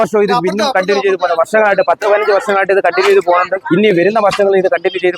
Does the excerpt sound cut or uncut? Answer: cut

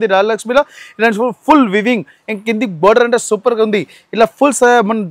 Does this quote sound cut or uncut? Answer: uncut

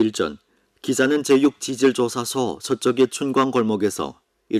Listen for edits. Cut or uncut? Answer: cut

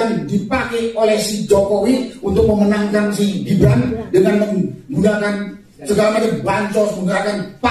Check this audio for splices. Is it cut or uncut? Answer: uncut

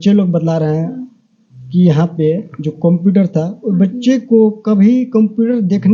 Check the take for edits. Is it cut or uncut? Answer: uncut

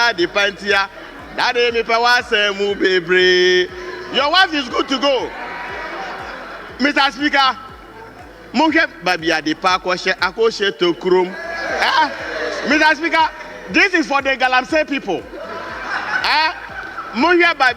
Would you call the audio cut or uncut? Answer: uncut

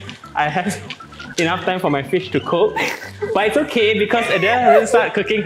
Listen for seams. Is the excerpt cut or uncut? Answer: uncut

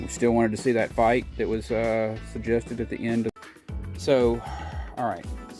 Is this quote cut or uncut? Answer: cut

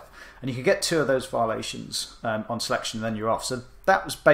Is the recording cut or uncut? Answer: uncut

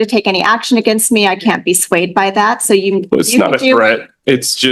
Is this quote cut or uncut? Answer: uncut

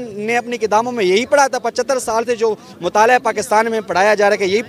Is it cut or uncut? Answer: uncut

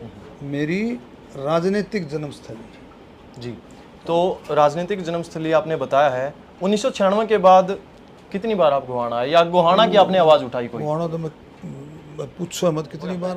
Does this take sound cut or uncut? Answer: uncut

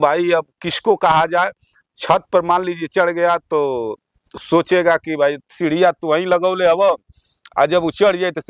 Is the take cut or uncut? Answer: uncut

